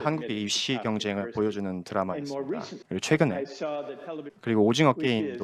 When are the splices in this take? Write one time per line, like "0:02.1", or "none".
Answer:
none